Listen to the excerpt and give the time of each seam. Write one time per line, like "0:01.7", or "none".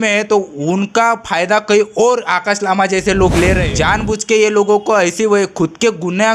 0:03.7